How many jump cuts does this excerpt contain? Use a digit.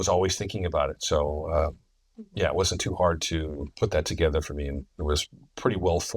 1